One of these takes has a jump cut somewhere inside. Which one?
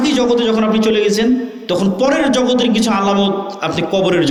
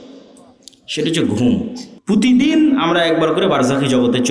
second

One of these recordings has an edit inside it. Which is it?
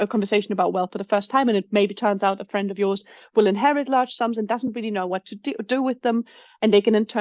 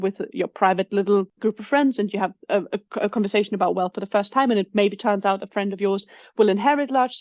second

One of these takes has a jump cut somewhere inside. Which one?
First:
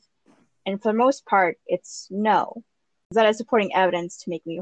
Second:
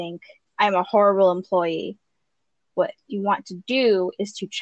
first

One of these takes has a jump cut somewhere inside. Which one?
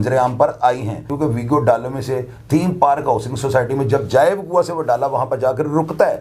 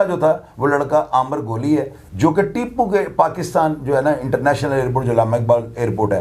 first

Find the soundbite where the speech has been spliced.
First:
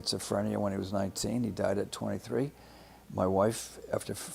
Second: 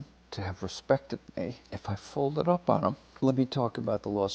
second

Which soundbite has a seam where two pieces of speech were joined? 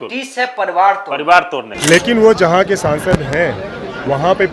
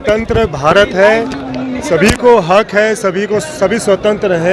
first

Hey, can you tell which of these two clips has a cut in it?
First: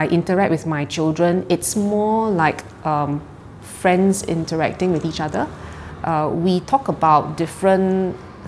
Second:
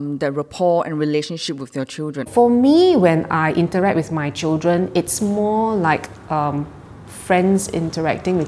second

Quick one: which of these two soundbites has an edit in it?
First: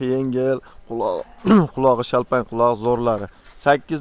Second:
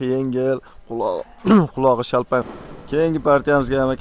second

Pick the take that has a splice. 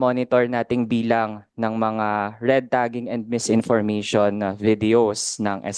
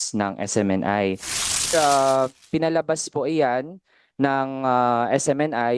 second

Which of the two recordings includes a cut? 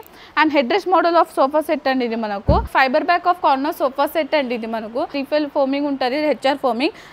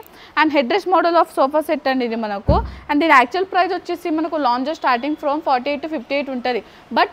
first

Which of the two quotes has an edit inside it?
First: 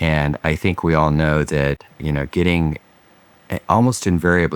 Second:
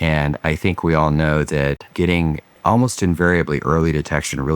second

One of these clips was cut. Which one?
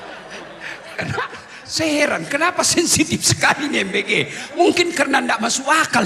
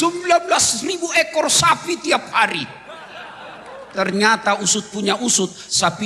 first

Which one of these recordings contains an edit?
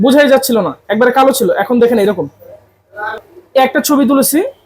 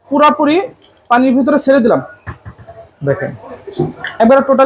first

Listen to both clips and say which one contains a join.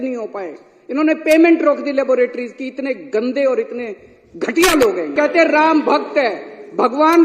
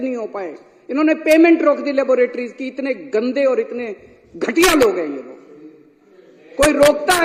first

